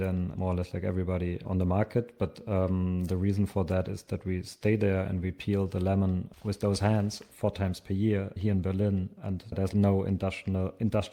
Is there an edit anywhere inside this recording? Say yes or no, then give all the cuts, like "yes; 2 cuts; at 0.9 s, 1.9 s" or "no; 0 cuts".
no; 0 cuts